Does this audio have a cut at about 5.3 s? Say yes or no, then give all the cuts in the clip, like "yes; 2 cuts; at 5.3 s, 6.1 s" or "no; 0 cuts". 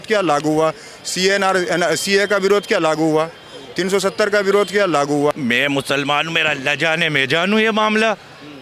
yes; 1 cut; at 5.3 s